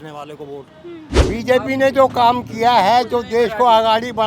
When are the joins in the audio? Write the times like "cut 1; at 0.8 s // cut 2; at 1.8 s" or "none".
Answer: cut 1; at 1.1 s

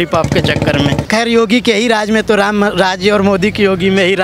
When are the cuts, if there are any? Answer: cut 1; at 1.1 s

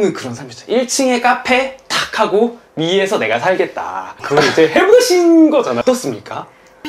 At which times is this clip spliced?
cut 1; at 5.8 s

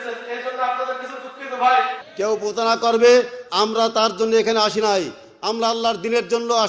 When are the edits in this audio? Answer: cut 1; at 2.0 s

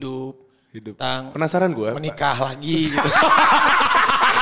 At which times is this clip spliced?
none

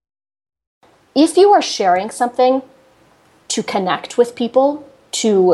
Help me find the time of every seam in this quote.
cut 1; at 0.9 s

